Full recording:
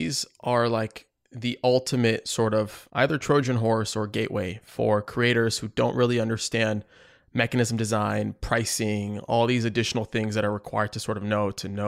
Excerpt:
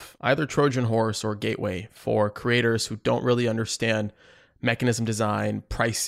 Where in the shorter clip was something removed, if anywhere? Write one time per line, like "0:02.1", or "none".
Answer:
none